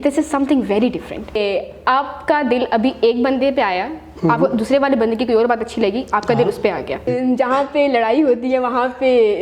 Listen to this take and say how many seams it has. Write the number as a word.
two